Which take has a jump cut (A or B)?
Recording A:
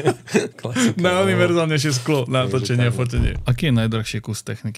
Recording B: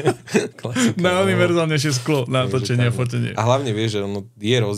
A